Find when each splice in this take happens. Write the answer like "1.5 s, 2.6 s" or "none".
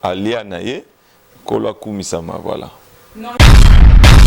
3.3 s